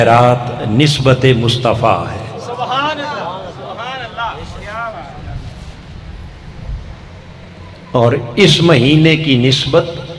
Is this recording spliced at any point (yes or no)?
no